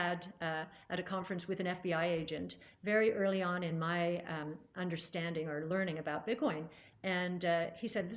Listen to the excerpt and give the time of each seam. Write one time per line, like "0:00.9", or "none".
none